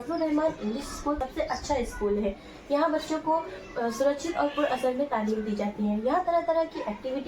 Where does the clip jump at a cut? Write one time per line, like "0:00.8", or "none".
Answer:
0:01.2

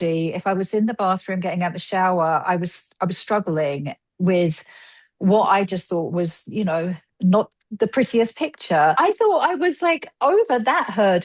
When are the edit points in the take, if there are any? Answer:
0:09.0

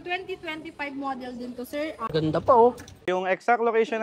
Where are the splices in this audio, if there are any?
0:02.1
0:02.9

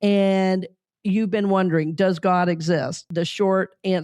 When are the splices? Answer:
0:03.0

